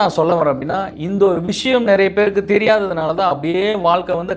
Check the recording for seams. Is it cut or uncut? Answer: uncut